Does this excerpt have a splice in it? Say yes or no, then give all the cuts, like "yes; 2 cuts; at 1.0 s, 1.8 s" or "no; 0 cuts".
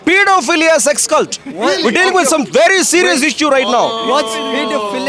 no; 0 cuts